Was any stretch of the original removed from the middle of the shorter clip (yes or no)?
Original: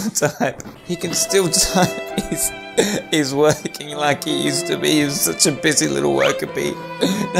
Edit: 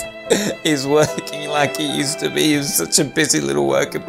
no